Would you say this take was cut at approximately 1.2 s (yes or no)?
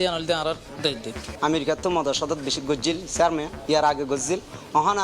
yes